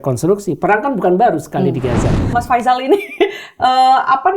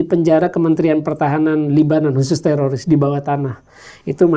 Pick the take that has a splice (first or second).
first